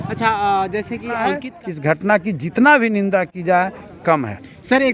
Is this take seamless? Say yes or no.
no